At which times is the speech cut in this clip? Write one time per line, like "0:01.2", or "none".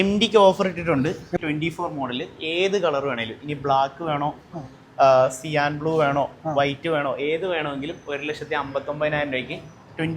0:01.3